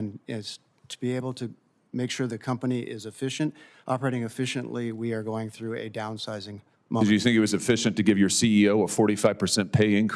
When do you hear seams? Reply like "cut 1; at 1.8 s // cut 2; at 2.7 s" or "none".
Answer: none